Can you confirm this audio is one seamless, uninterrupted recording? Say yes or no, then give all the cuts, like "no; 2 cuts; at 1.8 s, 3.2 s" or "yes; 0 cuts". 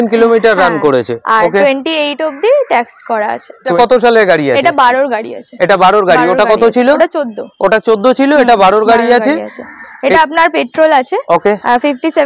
no; 1 cut; at 3.7 s